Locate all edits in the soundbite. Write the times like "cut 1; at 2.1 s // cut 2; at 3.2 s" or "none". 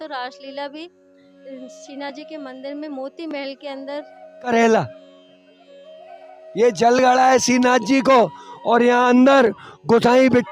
cut 1; at 4.5 s